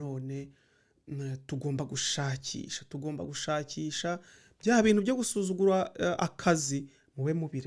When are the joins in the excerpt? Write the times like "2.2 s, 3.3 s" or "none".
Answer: none